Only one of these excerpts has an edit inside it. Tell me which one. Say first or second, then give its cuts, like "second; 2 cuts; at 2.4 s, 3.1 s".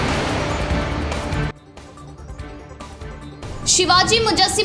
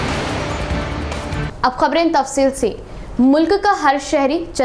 first; 1 cut; at 1.2 s